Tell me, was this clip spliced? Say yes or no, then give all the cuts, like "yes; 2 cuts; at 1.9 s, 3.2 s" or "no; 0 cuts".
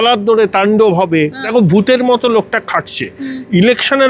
yes; 1 cut; at 1.4 s